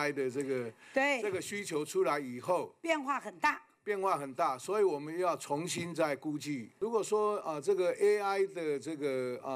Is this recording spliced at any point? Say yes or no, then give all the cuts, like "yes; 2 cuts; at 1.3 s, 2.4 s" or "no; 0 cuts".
yes; 1 cut; at 6.8 s